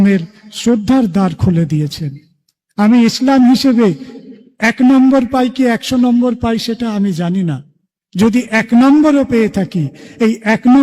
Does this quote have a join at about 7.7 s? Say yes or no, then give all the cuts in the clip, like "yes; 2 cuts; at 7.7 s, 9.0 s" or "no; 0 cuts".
no; 0 cuts